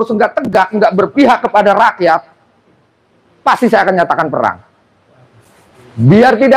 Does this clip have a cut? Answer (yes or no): no